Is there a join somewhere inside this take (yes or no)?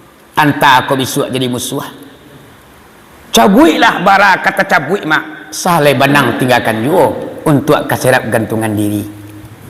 no